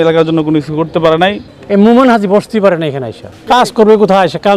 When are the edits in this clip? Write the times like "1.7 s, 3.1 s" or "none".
1.5 s, 3.3 s